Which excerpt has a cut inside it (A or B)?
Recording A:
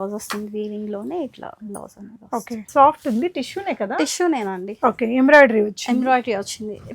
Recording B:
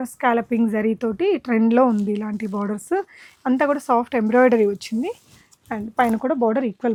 A